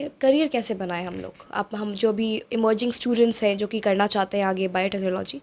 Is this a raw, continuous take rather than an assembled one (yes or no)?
yes